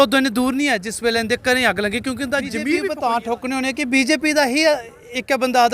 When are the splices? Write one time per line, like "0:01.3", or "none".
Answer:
0:02.9